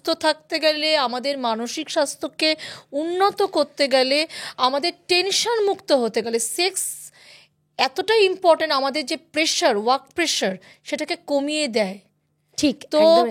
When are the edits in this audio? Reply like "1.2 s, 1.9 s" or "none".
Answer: none